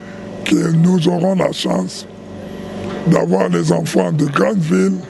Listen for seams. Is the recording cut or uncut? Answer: uncut